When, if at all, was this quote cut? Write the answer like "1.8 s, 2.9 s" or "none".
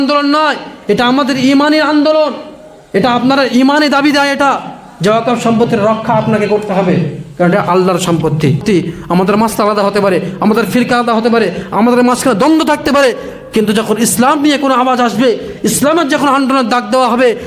8.6 s